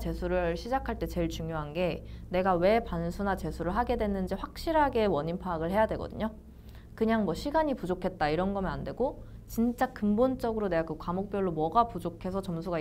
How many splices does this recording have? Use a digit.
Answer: 0